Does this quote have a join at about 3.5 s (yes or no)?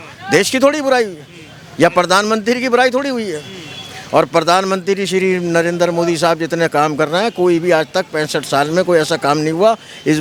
no